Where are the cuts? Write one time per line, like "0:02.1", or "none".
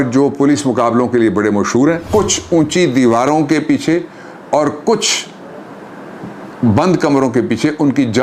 0:02.0